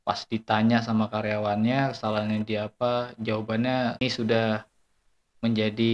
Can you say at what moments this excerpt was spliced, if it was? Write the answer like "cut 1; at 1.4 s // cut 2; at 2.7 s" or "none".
cut 1; at 4.0 s